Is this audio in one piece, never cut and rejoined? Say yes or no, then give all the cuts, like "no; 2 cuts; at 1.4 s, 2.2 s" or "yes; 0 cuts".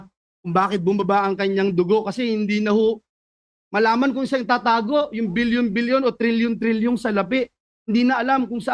yes; 0 cuts